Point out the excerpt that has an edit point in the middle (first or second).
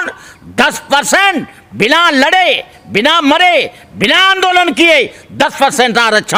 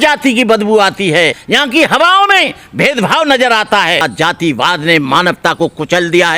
second